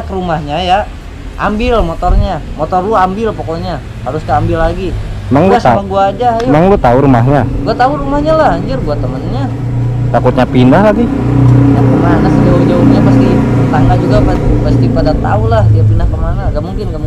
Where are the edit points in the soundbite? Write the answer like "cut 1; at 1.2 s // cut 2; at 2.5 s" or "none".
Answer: none